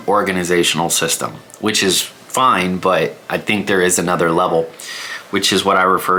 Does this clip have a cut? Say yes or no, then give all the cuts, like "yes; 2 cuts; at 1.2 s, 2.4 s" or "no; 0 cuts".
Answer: no; 0 cuts